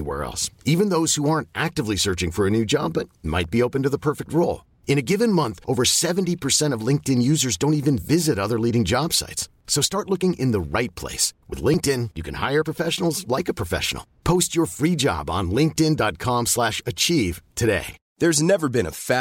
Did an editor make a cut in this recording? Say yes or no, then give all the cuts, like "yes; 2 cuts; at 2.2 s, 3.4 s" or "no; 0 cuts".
yes; 1 cut; at 18.0 s